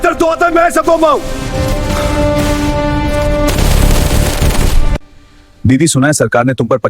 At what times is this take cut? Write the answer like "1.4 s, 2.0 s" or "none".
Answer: 5.0 s